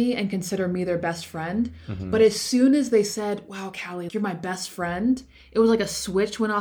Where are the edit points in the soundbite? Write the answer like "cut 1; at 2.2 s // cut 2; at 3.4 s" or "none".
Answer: cut 1; at 4.1 s